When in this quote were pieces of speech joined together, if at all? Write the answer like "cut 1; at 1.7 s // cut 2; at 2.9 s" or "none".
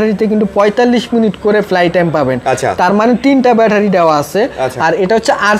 none